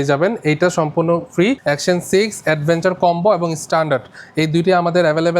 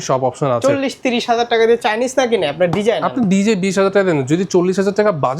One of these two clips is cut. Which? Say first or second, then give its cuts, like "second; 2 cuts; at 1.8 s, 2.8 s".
first; 1 cut; at 1.6 s